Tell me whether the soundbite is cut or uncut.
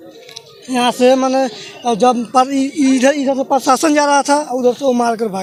uncut